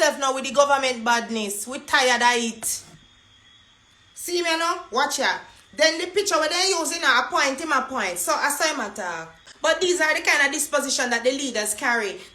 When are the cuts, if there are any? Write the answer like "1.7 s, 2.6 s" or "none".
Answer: 9.4 s